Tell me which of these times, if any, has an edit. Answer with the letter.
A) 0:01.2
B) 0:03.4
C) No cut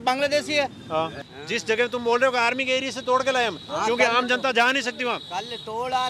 A